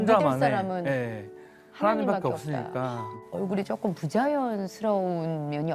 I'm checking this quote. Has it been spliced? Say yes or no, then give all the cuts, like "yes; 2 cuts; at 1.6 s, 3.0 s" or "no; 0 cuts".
no; 0 cuts